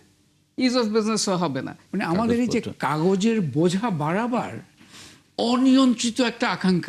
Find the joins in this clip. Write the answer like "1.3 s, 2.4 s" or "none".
1.8 s